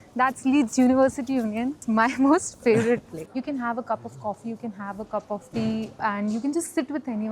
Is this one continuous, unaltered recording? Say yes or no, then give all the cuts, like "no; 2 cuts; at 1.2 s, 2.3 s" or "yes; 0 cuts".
no; 3 cuts; at 1.8 s, 3.3 s, 6.0 s